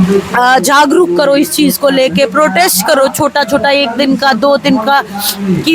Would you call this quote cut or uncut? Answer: uncut